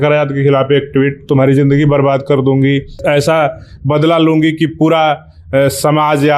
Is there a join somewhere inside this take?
yes; 1 cut; at 3.0 s

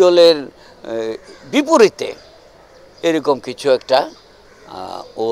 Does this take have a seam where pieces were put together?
no; 0 cuts

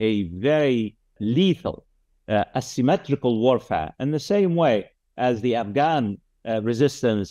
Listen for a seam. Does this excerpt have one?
yes; 1 cut; at 1.2 s

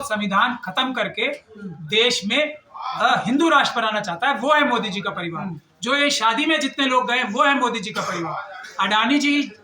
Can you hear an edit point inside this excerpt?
no; 0 cuts

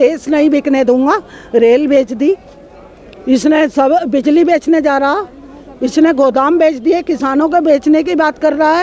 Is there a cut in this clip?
no; 0 cuts

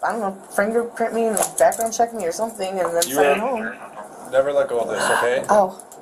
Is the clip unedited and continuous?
yes; 0 cuts

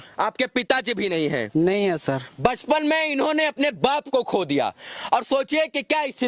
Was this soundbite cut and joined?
no; 0 cuts

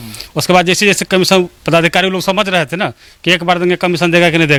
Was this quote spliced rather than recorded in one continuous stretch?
no; 0 cuts

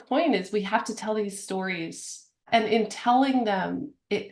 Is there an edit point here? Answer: yes; 1 cut; at 2.4 s

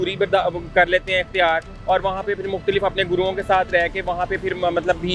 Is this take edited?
no; 0 cuts

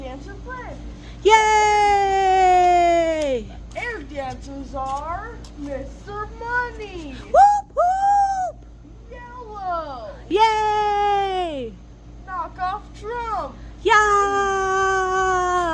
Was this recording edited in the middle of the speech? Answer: no; 0 cuts

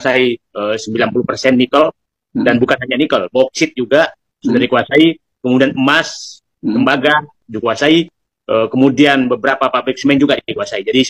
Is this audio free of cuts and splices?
yes; 0 cuts

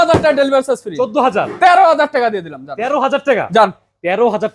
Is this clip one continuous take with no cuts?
yes; 0 cuts

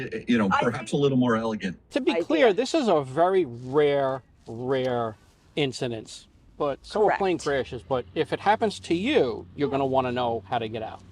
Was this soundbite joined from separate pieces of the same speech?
yes; 1 cut; at 1.9 s

